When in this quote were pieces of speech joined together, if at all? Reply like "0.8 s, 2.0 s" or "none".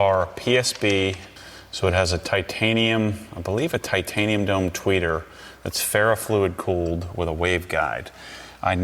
1.3 s